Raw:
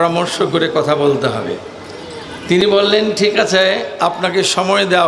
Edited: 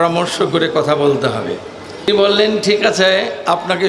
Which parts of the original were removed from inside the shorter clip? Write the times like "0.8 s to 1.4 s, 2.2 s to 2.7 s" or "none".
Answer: 2.1 s to 2.6 s